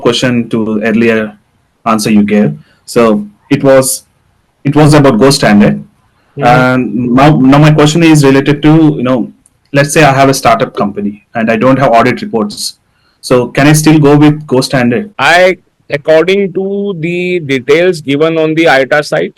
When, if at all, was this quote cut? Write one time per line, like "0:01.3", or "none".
0:15.1